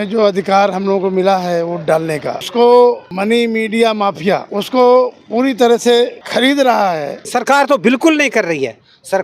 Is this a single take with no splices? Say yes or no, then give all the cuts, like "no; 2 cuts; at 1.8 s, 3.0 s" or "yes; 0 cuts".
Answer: no; 5 cuts; at 2.4 s, 3.1 s, 4.5 s, 6.2 s, 7.2 s